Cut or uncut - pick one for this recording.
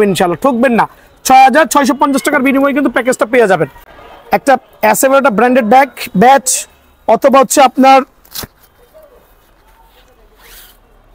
cut